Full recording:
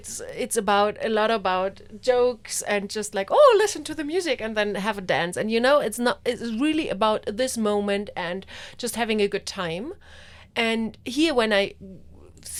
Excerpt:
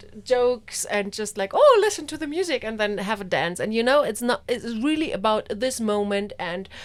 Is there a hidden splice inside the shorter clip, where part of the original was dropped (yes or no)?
no